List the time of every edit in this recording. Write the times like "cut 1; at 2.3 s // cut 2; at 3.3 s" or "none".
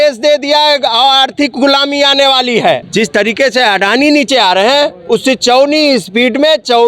cut 1; at 2.9 s